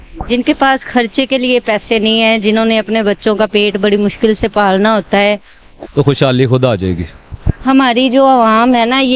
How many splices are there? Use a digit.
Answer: 1